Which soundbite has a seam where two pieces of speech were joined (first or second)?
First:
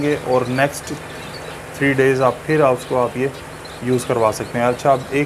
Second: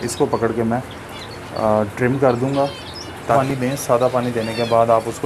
second